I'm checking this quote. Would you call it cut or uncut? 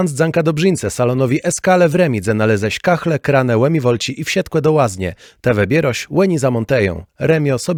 uncut